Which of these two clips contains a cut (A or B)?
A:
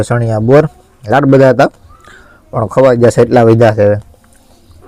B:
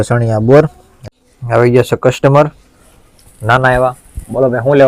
B